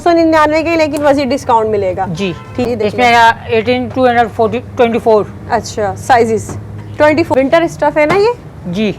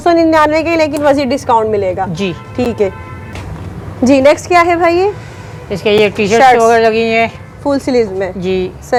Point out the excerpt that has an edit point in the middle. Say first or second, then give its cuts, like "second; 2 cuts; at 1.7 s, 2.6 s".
first; 2 cuts; at 2.7 s, 7.3 s